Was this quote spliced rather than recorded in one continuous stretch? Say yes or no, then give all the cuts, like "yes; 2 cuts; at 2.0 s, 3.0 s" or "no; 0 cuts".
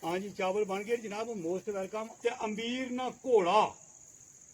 yes; 1 cut; at 2.1 s